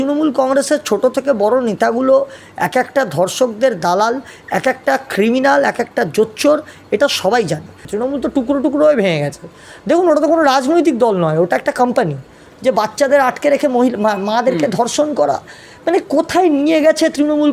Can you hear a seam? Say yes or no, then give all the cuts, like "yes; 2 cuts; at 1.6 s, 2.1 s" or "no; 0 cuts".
yes; 2 cuts; at 7.8 s, 12.4 s